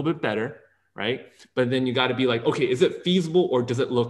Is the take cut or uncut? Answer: uncut